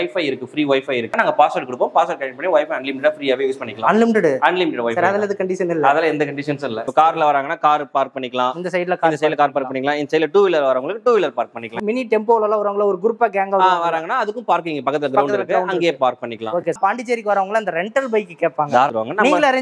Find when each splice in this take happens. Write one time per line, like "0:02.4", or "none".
0:01.1
0:06.8
0:11.8
0:16.8
0:18.7